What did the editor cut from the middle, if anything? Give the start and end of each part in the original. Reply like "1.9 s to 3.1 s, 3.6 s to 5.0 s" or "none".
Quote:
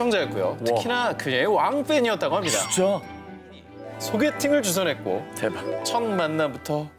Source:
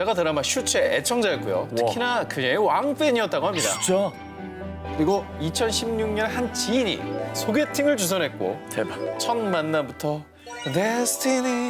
4.8 s to 7.1 s